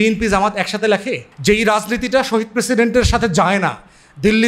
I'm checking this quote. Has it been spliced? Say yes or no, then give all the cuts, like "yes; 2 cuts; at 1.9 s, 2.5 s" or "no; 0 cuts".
yes; 1 cut; at 1.3 s